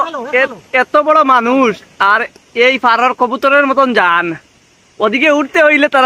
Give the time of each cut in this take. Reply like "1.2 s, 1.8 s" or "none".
none